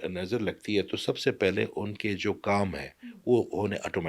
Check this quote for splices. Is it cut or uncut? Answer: uncut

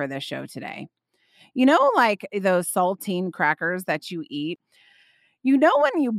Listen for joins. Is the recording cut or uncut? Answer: cut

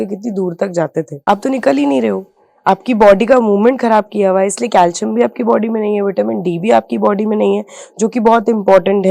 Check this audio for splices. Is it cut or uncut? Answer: cut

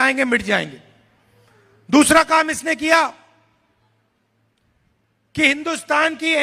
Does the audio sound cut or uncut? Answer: uncut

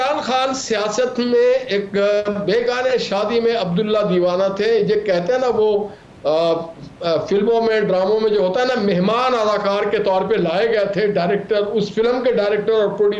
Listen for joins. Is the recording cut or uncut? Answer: uncut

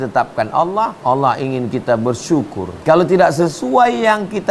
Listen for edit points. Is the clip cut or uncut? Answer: cut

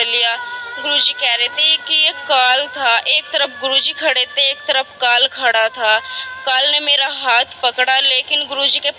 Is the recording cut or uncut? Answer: uncut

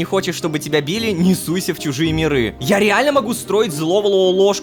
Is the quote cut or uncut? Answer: uncut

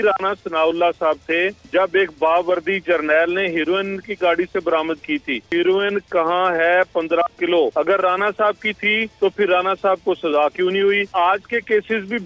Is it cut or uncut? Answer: cut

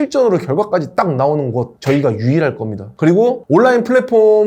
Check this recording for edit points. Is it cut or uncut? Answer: uncut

